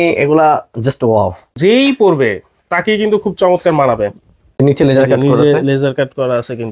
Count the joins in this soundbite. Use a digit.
2